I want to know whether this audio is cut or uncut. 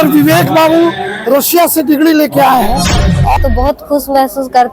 cut